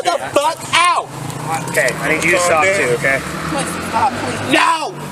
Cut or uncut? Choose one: uncut